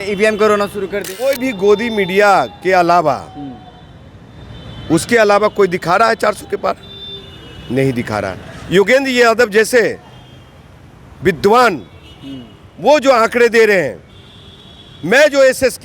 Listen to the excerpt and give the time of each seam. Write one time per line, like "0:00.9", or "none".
0:01.2